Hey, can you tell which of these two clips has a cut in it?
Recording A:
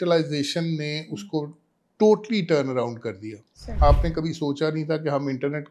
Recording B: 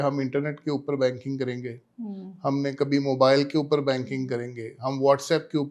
A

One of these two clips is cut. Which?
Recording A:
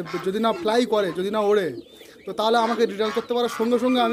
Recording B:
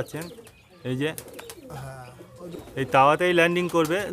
B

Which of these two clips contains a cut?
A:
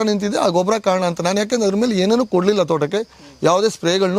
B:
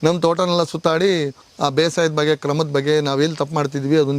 B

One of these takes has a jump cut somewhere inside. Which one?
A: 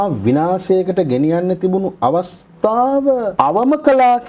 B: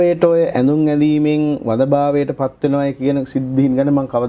A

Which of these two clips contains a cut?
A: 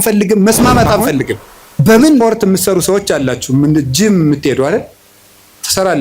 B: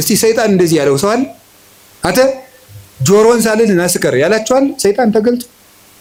A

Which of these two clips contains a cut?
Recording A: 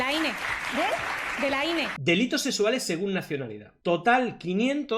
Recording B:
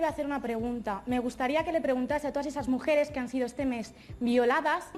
A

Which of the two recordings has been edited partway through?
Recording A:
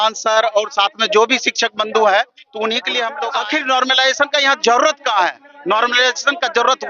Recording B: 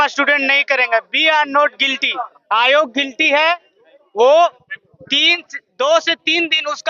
A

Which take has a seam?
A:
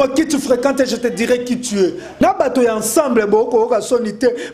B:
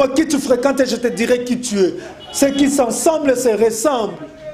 A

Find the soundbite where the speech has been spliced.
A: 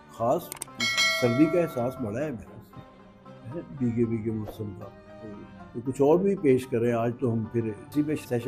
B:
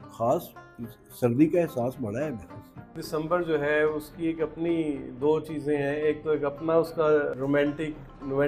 B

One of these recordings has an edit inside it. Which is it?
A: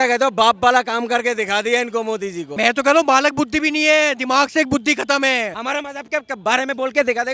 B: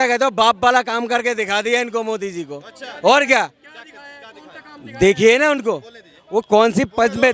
A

